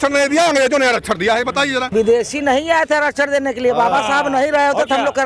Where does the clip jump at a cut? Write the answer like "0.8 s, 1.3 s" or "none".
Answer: 1.8 s